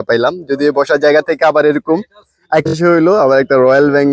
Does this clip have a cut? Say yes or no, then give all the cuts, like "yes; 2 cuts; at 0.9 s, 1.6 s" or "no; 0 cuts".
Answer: yes; 1 cut; at 2.7 s